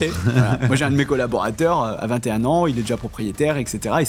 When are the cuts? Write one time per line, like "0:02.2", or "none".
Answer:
none